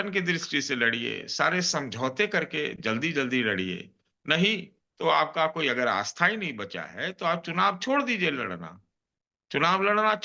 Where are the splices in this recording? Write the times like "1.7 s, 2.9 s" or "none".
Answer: none